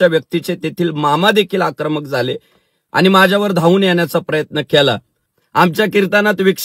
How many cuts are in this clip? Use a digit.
1